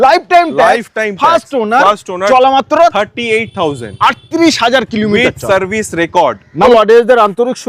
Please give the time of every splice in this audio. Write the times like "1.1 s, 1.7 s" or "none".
6.6 s